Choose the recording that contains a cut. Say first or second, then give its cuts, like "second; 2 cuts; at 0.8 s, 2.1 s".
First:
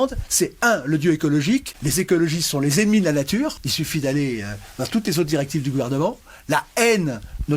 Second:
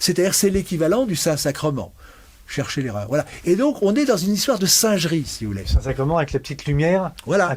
first; 2 cuts; at 1.8 s, 3.6 s